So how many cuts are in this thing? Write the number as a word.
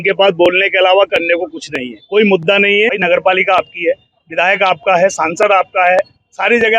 one